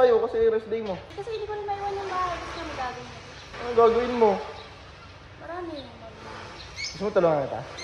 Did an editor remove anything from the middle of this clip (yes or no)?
yes